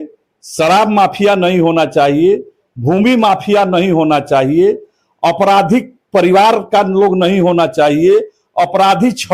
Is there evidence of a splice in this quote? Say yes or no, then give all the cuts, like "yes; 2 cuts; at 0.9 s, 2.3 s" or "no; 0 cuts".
no; 0 cuts